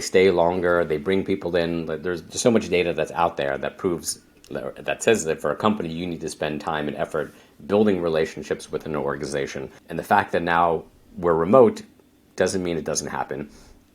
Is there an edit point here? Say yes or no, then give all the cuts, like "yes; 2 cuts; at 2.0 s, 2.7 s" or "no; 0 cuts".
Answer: yes; 1 cut; at 9.8 s